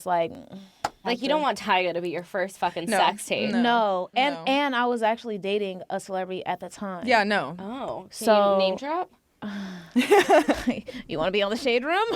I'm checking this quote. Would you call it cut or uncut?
cut